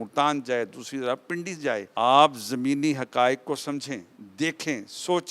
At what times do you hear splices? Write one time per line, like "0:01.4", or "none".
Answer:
0:01.9